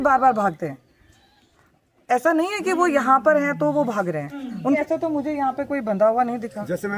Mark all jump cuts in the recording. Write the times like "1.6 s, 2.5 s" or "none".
4.8 s